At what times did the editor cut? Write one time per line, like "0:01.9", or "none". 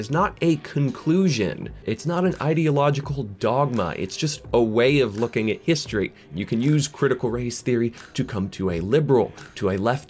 0:01.8
0:06.3

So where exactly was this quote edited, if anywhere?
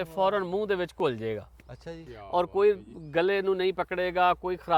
none

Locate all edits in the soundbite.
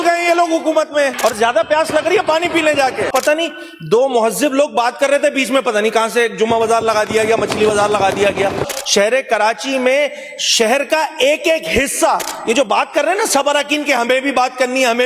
0:01.1
0:03.1
0:08.7

